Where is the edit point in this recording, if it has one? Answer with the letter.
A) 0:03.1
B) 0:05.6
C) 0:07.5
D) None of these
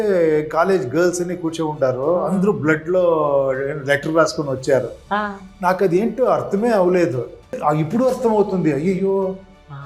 C